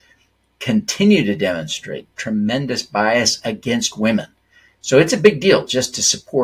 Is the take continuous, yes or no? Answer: yes